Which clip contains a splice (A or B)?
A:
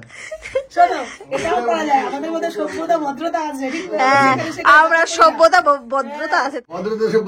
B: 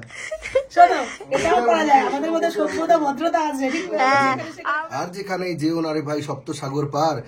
B